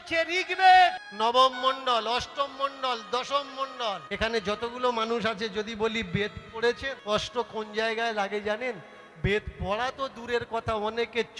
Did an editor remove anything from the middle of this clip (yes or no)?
yes